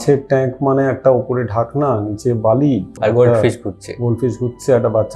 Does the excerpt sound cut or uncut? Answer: cut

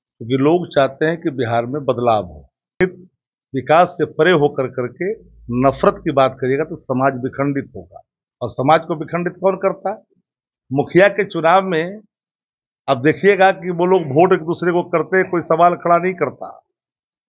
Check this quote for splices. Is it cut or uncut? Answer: cut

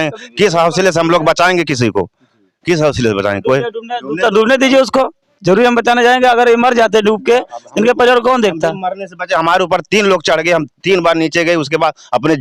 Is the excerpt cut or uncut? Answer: uncut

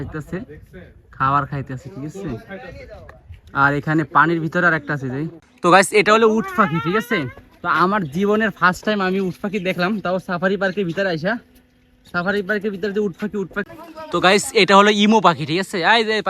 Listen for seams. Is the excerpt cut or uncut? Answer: cut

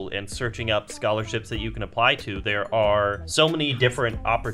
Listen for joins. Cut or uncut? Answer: cut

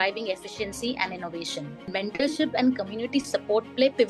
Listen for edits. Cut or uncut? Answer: cut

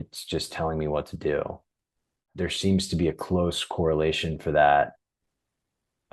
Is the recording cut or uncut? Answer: cut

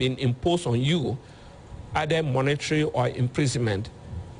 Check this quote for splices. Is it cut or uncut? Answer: uncut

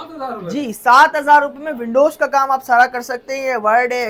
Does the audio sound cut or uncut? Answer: uncut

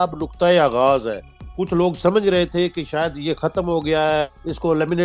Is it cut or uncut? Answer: uncut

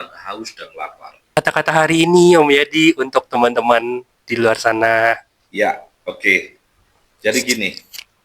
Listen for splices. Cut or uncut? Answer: cut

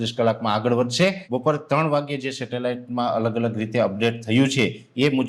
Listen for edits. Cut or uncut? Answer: cut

